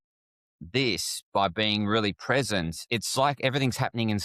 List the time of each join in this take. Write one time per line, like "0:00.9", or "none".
0:02.8